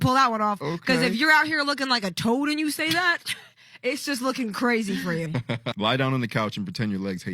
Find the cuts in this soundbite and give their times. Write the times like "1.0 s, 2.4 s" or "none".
5.3 s